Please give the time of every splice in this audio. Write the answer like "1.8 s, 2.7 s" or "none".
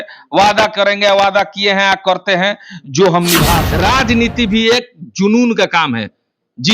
3.6 s